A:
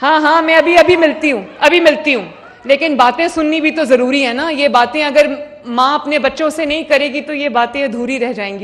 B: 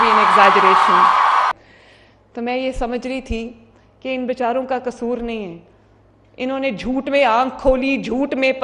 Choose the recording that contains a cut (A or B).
B